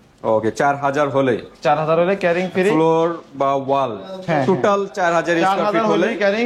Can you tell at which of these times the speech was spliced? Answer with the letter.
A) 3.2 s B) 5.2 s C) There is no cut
C